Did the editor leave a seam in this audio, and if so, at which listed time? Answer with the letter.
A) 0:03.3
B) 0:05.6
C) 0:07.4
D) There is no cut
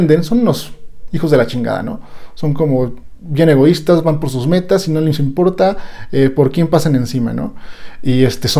D